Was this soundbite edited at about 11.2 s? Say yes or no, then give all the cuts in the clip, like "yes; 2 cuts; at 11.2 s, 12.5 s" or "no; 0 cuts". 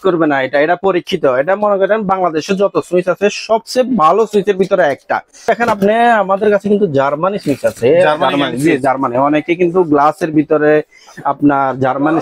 no; 1 cut; at 5.5 s